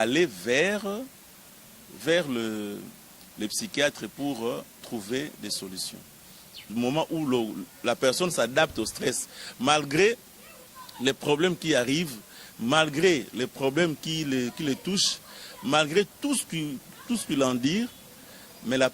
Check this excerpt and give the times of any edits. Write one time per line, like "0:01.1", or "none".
0:06.7